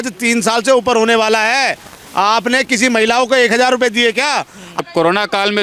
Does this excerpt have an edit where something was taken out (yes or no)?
yes